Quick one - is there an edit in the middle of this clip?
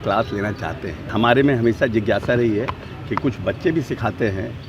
yes; 1 cut; at 1.1 s

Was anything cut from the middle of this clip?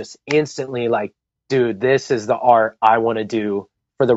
no; 0 cuts

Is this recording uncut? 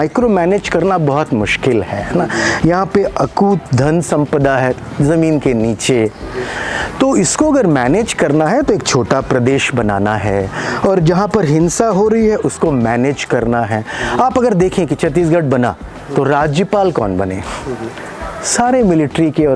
yes; 0 cuts

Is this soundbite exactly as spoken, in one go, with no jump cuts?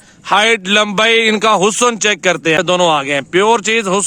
no; 1 cut; at 2.6 s

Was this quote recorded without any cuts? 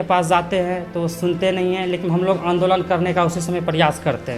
yes; 0 cuts

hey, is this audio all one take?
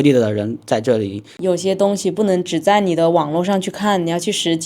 no; 1 cut; at 1.2 s

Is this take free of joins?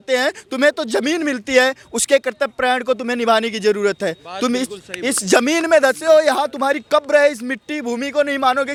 yes; 0 cuts

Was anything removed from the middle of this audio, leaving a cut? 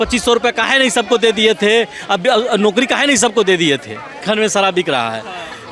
yes; 1 cut; at 4.2 s

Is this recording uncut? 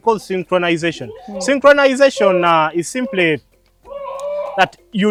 yes; 0 cuts

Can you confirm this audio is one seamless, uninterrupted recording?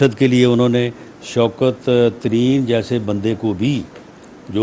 no; 1 cut; at 3.3 s

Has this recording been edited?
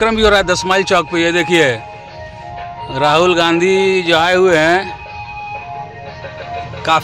no; 0 cuts

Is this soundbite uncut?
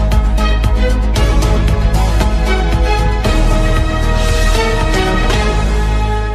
yes; 0 cuts

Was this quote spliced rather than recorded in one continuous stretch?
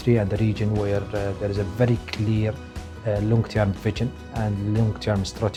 no; 0 cuts

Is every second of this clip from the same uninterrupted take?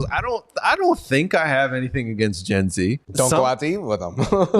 no; 1 cut; at 3.0 s

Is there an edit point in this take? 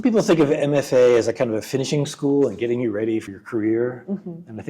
yes; 1 cut; at 3.2 s

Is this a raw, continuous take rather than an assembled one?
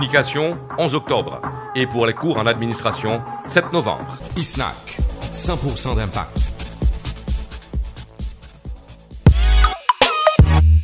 no; 1 cut; at 9.2 s

